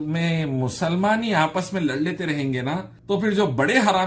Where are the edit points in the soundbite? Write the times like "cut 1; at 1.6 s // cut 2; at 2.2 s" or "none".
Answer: cut 1; at 2.9 s